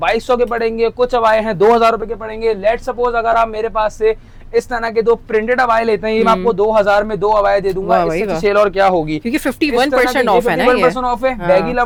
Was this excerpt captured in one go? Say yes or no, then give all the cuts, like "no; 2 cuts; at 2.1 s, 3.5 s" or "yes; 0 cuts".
yes; 0 cuts